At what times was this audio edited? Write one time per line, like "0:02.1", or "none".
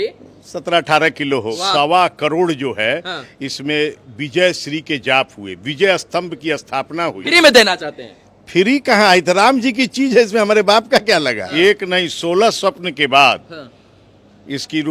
0:01.5
0:07.2
0:11.4